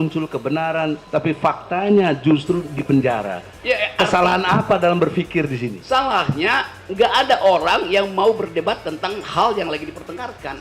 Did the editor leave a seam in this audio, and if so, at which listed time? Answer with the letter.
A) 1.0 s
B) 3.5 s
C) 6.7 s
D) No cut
A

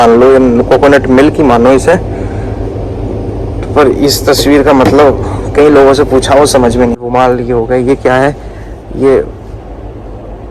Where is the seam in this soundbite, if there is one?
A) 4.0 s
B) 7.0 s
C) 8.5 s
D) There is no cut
B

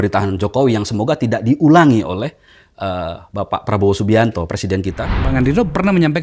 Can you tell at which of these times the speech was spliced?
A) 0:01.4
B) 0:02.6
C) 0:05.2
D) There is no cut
C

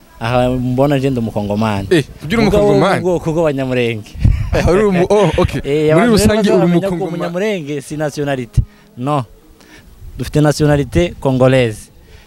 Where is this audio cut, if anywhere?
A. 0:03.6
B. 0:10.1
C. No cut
C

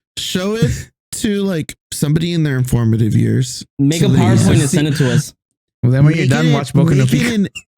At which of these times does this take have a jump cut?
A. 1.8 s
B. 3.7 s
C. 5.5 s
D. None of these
A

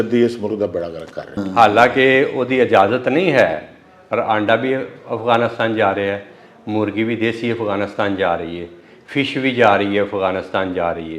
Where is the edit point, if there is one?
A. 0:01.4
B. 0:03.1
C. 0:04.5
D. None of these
A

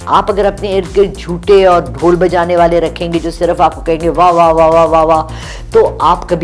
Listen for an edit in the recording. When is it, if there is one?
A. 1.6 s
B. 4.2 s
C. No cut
C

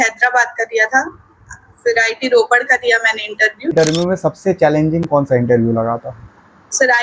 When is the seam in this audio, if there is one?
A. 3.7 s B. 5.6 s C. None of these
A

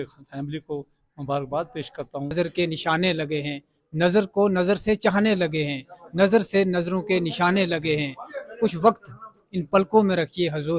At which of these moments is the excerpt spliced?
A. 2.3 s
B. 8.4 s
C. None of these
A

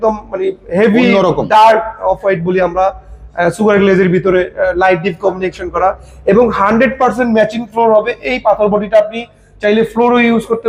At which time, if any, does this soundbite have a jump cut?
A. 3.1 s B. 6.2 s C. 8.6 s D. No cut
D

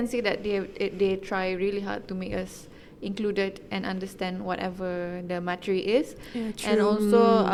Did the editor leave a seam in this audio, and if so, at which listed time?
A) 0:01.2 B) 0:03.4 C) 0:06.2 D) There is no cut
D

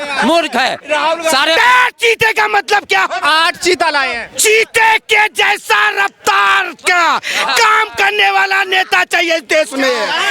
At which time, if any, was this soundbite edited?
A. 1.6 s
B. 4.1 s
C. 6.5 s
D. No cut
A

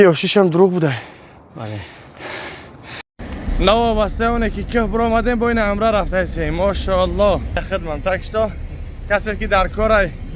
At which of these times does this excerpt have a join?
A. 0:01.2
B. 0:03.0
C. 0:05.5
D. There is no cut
B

